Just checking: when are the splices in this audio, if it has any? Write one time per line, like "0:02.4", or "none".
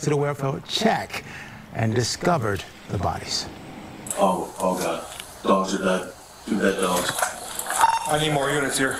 none